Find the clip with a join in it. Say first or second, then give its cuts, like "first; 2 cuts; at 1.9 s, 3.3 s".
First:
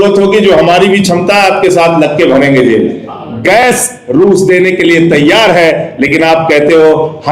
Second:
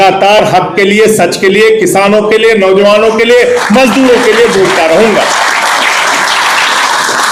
first; 1 cut; at 3.2 s